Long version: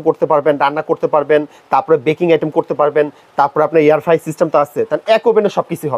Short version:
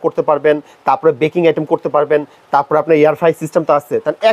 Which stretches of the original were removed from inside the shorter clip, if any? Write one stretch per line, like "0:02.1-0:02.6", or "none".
none